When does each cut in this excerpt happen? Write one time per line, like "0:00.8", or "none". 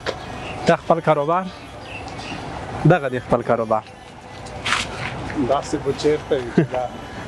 none